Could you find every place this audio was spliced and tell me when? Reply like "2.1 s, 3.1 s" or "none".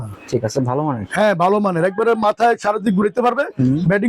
none

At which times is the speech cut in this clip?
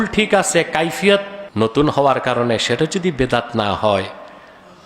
1.4 s

